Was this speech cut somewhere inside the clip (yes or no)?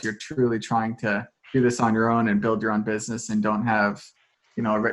no